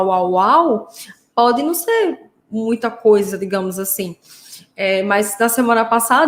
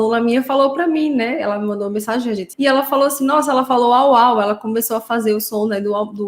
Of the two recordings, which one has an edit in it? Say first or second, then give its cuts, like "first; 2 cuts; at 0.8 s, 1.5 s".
second; 1 cut; at 2.5 s